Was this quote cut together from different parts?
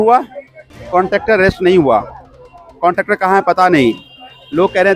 no; 0 cuts

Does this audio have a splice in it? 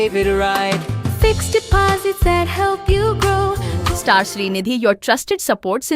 yes; 1 cut; at 3.7 s

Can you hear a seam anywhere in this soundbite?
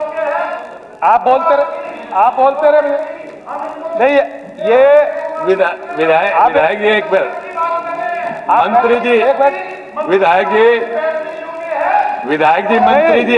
no; 0 cuts

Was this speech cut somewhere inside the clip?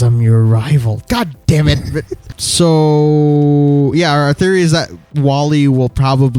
yes; 1 cut; at 2.3 s

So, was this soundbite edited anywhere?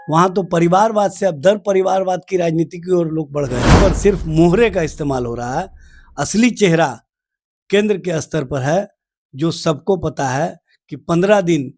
yes; 1 cut; at 3.8 s

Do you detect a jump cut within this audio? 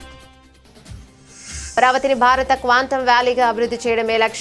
yes; 1 cut; at 1.7 s

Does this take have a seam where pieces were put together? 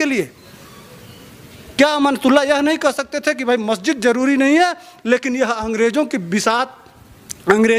no; 0 cuts

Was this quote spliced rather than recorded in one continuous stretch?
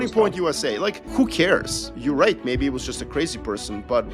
yes; 2 cuts; at 1.0 s, 1.9 s

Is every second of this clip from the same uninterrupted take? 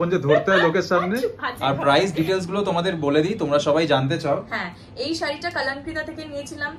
no; 1 cut; at 1.5 s

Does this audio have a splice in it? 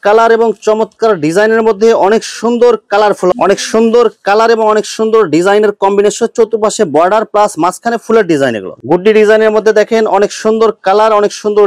yes; 2 cuts; at 3.3 s, 8.8 s

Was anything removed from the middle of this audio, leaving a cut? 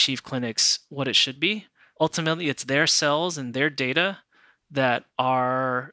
yes; 1 cut; at 1.9 s

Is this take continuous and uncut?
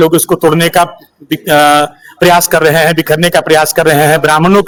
yes; 0 cuts

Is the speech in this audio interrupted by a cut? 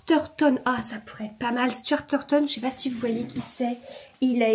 no; 0 cuts

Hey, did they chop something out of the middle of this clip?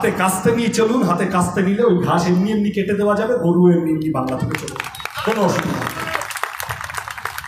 no; 0 cuts

